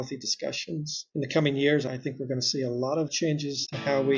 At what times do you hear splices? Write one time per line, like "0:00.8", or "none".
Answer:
0:01.0
0:01.9
0:03.2